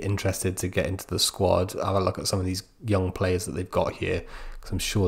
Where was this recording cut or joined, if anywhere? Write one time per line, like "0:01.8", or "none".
none

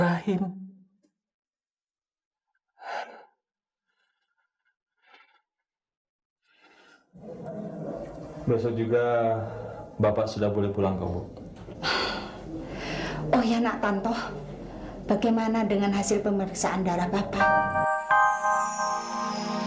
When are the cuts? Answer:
0:17.3

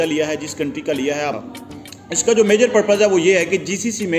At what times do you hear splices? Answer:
0:01.4

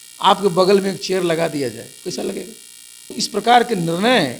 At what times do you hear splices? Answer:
0:03.2

